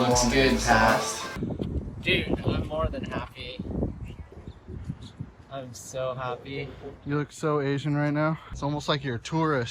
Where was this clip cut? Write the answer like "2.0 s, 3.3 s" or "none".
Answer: 1.3 s, 4.3 s, 8.5 s